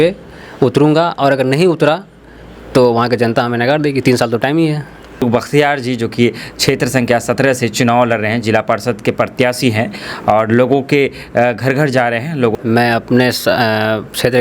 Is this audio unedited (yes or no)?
no